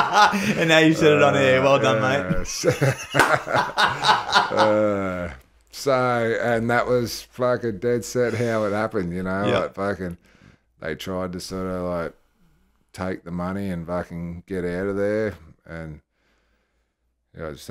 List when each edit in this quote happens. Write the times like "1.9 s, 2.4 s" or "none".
none